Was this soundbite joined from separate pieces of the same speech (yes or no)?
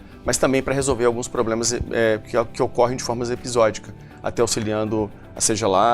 no